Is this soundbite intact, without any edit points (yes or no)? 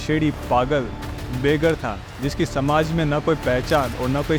yes